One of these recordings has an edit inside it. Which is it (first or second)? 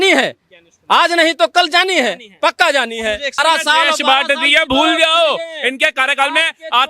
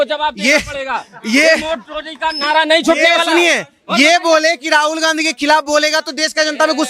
first